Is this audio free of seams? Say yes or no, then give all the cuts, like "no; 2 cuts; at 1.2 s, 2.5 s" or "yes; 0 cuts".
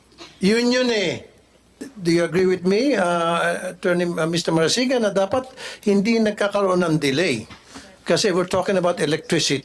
no; 1 cut; at 1.9 s